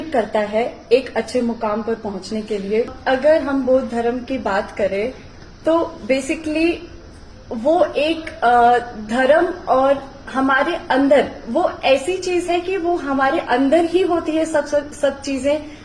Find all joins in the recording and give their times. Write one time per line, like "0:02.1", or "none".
0:02.9